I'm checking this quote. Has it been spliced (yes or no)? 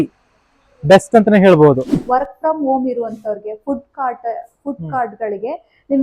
yes